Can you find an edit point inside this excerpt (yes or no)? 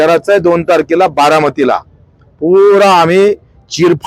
no